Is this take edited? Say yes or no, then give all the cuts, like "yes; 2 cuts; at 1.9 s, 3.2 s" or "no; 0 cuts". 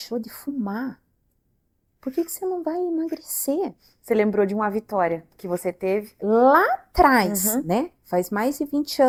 no; 0 cuts